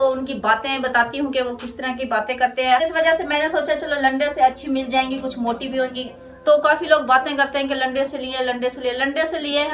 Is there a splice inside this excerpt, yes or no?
yes